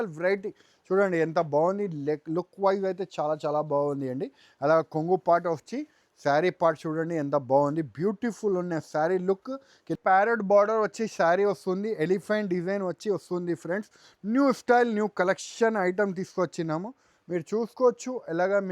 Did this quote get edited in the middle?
yes; 1 cut; at 9.9 s

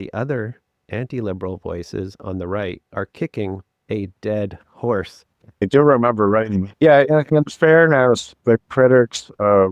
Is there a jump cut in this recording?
yes; 3 cuts; at 5.6 s, 6.7 s, 8.3 s

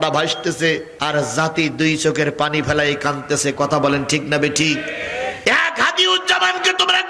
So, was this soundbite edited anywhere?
yes; 1 cut; at 5.4 s

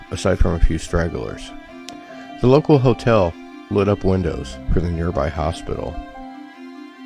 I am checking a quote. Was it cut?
yes; 1 cut; at 6.1 s

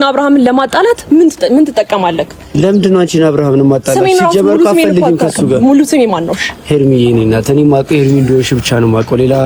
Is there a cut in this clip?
no; 0 cuts

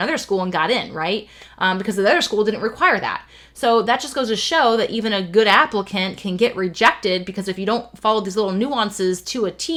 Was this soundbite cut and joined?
no; 0 cuts

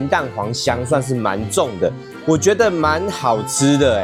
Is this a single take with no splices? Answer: yes; 0 cuts

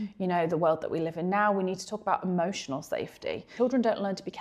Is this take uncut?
no; 1 cut; at 3.5 s

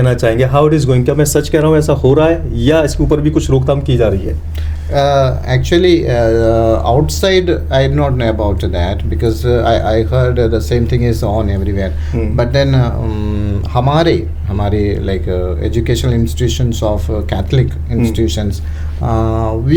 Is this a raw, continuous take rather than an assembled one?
yes; 0 cuts

